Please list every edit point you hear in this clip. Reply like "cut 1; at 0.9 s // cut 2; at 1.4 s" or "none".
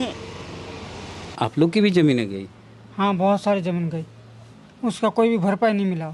cut 1; at 1.3 s